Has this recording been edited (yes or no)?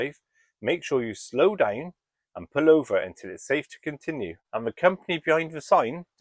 yes